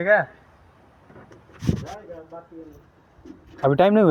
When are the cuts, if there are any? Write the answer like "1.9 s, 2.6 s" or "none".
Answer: none

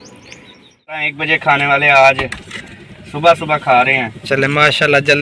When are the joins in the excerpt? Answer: 1.1 s

